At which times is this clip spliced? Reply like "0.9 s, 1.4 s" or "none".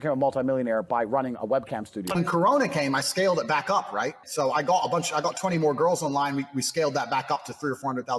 2.1 s

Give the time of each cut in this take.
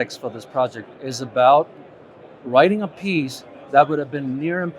none

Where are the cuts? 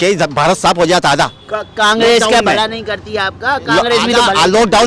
none

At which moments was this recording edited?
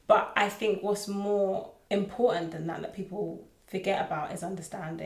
1.7 s, 3.5 s

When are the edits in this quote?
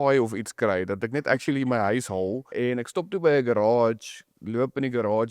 2.5 s

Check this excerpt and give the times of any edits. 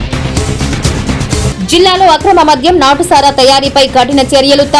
1.0 s

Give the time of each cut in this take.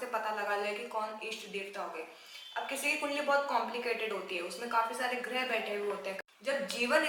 6.1 s

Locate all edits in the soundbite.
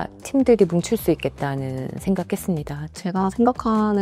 2.8 s

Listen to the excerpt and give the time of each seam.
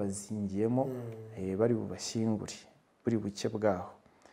none

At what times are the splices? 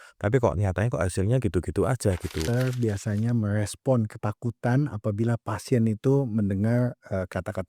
2.4 s

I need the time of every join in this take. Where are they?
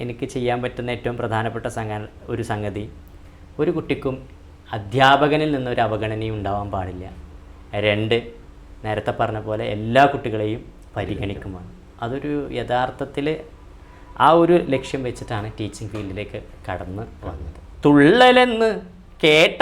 17.6 s

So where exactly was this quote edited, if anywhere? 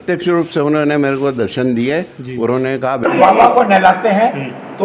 3.0 s

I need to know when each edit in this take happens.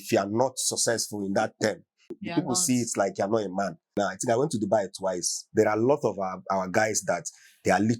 2.2 s, 3.9 s

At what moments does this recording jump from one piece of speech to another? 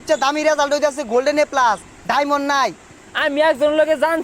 3.0 s

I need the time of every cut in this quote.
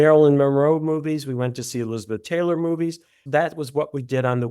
3.2 s

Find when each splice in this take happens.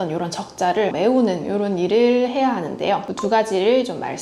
0.9 s, 3.1 s

